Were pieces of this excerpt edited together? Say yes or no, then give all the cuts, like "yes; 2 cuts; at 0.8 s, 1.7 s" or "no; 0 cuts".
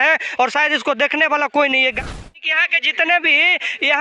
yes; 1 cut; at 2.0 s